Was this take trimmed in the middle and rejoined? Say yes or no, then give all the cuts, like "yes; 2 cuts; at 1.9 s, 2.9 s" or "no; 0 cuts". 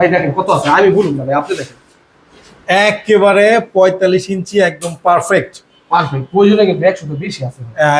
no; 0 cuts